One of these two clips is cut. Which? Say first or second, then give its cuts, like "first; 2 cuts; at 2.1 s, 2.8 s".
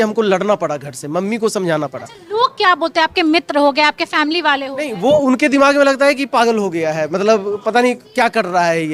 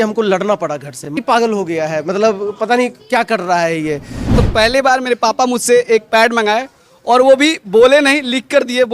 second; 2 cuts; at 1.1 s, 4.4 s